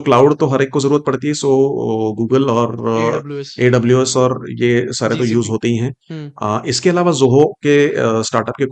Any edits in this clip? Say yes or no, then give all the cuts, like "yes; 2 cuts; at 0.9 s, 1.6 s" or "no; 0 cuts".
no; 0 cuts